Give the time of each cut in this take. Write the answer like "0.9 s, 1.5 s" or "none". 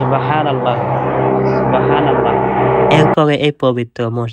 3.1 s